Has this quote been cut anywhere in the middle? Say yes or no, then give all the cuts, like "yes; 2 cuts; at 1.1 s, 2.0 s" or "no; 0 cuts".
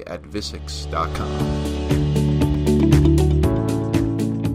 yes; 1 cut; at 1.1 s